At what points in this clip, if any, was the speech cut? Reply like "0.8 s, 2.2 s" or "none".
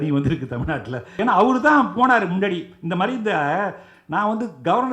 1.2 s